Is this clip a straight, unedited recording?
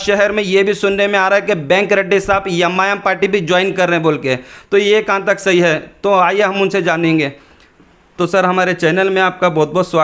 yes; 0 cuts

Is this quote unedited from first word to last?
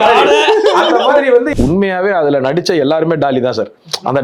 no; 1 cut; at 1.5 s

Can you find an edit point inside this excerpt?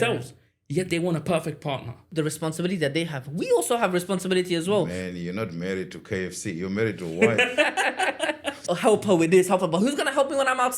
yes; 3 cuts; at 2.1 s, 4.9 s, 8.6 s

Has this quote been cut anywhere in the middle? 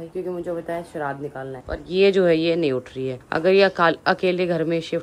no; 0 cuts

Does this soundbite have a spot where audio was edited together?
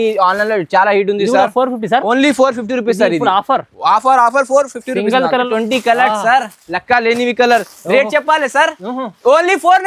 yes; 1 cut; at 5.5 s

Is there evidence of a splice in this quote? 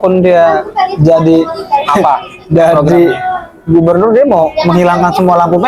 no; 0 cuts

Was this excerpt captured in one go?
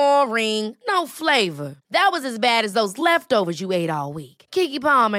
yes; 0 cuts

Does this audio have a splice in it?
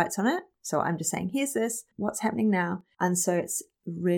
yes; 2 cuts; at 1.9 s, 2.9 s

